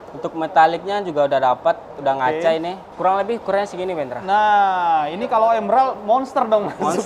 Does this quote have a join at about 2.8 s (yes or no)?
yes